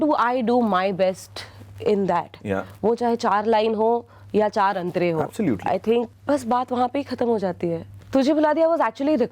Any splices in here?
yes; 1 cut; at 7.9 s

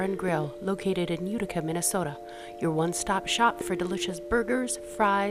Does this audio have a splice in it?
no; 0 cuts

